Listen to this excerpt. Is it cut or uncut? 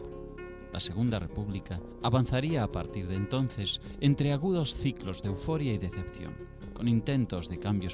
uncut